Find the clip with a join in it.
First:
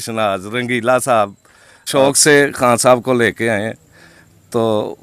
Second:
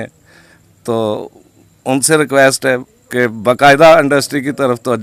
first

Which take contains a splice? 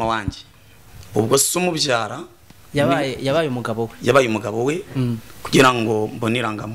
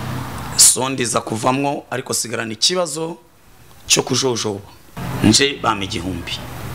second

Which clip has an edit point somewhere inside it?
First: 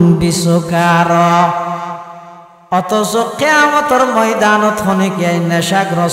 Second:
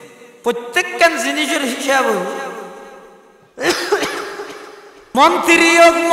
second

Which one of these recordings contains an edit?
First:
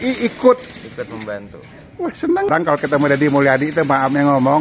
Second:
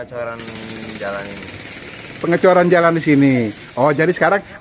first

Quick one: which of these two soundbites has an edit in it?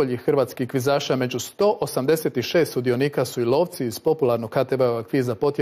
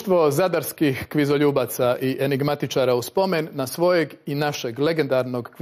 first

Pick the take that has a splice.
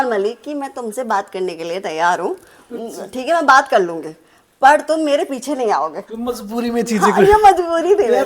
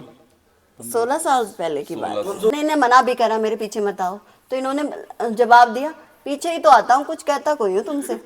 second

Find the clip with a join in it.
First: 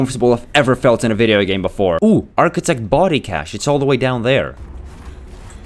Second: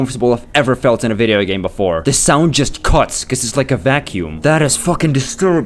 first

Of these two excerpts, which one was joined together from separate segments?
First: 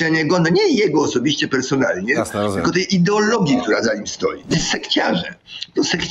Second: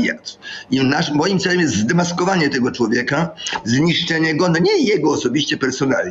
first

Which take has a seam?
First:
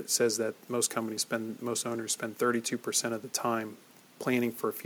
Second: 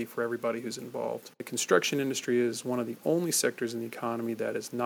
second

